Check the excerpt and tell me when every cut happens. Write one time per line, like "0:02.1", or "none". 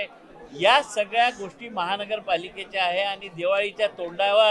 none